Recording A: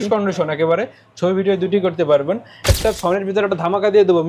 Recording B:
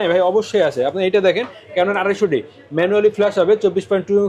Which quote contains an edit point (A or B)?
A